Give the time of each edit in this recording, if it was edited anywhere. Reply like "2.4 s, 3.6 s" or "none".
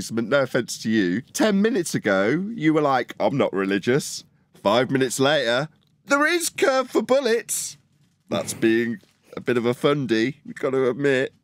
none